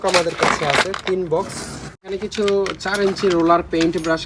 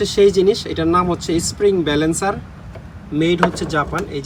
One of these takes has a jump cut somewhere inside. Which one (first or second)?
first